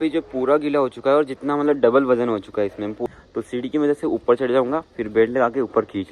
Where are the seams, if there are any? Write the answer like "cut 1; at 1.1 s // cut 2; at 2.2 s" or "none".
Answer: cut 1; at 3.0 s